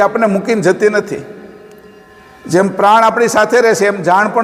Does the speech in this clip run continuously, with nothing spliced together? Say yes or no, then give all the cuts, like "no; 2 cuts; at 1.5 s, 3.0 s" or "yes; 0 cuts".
yes; 0 cuts